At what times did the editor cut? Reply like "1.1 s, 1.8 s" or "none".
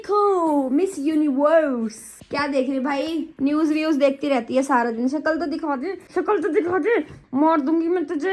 2.2 s, 7.2 s